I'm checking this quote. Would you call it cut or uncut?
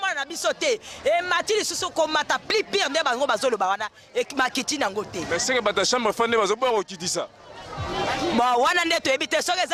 uncut